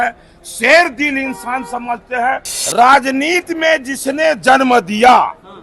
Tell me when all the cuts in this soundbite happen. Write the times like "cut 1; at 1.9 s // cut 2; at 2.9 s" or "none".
cut 1; at 2.5 s